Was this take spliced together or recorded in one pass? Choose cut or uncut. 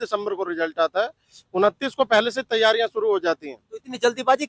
uncut